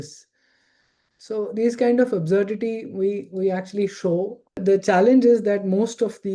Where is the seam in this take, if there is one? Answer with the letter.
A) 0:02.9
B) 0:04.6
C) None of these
B